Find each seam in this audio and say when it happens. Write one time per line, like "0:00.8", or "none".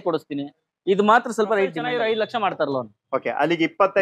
0:01.9